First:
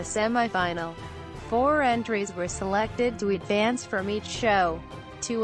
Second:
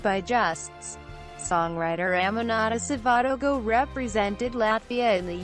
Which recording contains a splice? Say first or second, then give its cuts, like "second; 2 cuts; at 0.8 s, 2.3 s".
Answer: second; 1 cut; at 1.8 s